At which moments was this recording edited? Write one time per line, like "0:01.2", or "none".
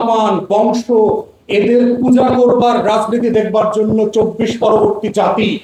none